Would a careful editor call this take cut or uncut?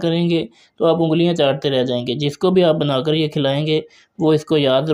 uncut